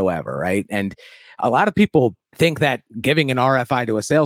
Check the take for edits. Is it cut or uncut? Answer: cut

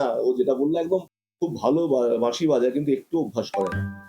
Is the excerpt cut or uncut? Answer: cut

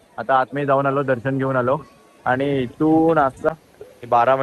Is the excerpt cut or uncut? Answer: cut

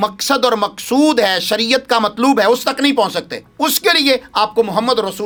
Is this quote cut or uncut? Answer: uncut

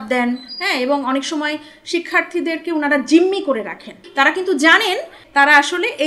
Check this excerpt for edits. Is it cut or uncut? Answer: cut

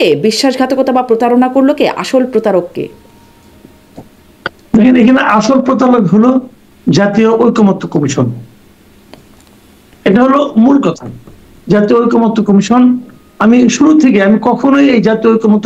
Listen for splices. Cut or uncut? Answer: uncut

